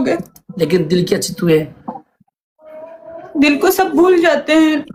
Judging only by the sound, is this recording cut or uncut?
uncut